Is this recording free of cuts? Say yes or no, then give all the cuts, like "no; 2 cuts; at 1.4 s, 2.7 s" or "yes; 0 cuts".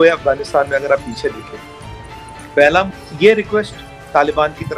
no; 1 cut; at 2.9 s